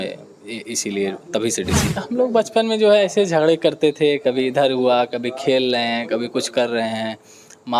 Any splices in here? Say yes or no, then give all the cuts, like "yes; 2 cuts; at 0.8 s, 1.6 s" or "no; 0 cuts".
yes; 1 cut; at 1.8 s